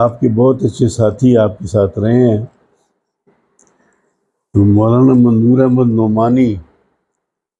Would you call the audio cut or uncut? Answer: uncut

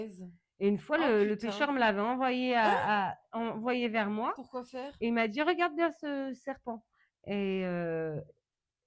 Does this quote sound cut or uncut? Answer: uncut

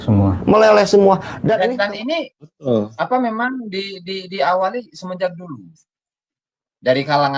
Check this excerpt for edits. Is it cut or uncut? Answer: cut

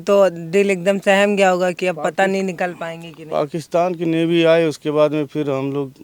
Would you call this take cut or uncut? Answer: uncut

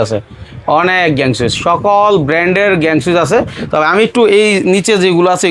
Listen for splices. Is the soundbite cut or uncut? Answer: uncut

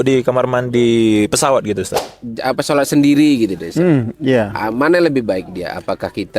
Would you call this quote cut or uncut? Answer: cut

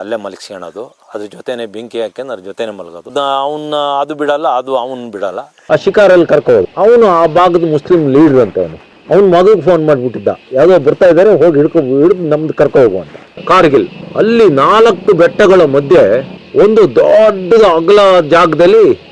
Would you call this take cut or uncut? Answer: cut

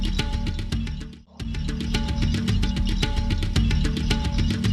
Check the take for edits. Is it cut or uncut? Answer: uncut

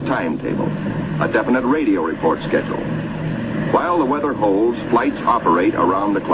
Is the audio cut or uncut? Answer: cut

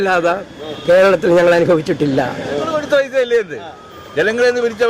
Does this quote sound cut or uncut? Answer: cut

